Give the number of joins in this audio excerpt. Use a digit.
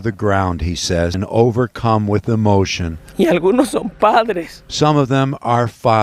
1